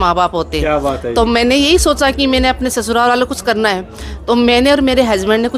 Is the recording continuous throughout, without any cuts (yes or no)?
yes